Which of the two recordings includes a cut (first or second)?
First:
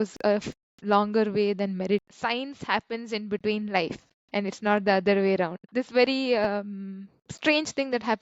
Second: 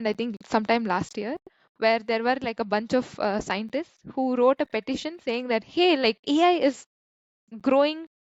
first